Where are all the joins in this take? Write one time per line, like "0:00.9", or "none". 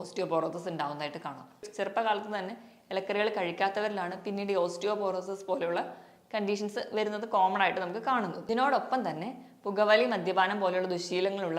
0:01.7
0:08.4